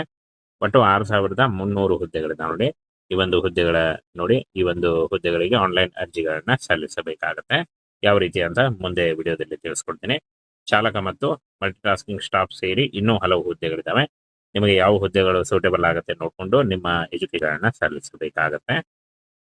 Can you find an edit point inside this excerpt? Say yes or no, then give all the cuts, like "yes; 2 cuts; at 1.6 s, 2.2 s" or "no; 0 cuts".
yes; 1 cut; at 17.4 s